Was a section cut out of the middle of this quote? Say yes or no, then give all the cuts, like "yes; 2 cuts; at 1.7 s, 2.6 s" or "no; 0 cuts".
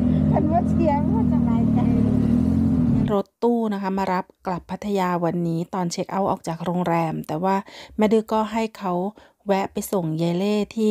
yes; 1 cut; at 3.1 s